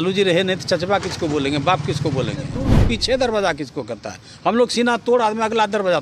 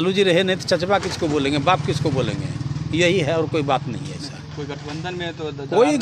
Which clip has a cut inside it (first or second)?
first